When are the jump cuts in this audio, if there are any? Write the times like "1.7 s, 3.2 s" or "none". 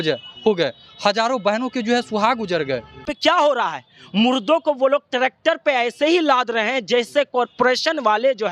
3.1 s